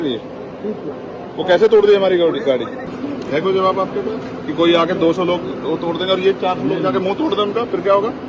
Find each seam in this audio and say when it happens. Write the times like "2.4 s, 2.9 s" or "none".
2.8 s